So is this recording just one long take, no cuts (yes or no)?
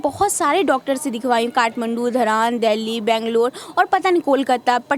yes